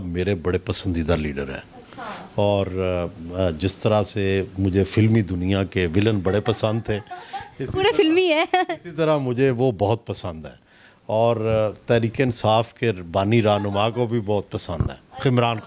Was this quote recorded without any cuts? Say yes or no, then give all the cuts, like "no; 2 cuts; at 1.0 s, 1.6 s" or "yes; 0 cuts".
yes; 0 cuts